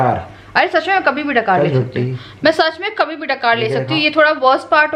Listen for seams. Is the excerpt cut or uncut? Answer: uncut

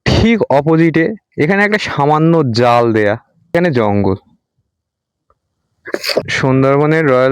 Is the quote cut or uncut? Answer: cut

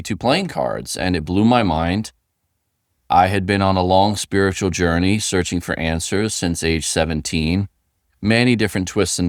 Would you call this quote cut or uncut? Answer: uncut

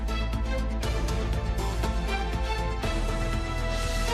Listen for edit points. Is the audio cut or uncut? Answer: cut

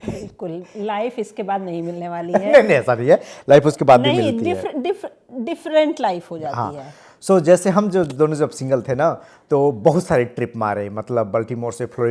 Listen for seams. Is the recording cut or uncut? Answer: uncut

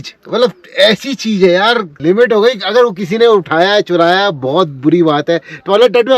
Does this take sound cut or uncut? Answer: cut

